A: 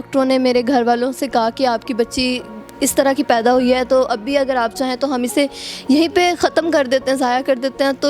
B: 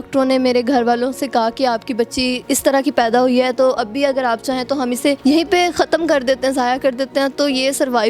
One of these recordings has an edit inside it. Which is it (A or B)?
B